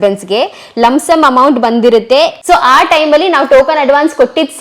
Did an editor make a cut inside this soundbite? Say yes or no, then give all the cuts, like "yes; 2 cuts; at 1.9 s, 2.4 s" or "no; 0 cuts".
yes; 1 cut; at 2.4 s